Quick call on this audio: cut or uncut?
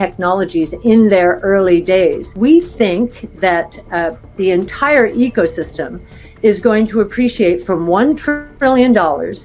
cut